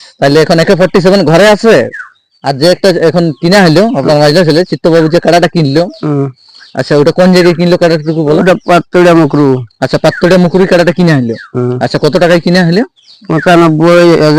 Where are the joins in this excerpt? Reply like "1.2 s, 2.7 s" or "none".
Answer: none